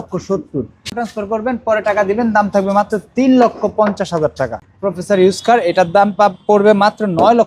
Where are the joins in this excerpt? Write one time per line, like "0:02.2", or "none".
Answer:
0:00.9
0:04.7